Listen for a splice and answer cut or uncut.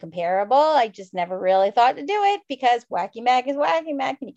uncut